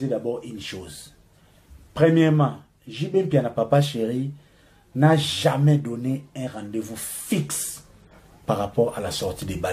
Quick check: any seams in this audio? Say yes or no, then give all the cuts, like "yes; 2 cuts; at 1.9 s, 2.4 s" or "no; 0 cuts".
no; 0 cuts